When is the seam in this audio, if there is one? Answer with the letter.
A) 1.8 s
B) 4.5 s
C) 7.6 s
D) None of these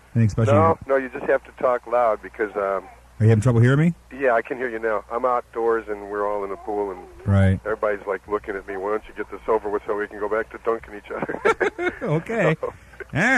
C